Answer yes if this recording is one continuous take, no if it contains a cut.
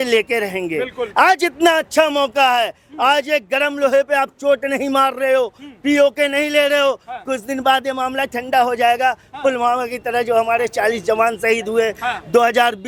yes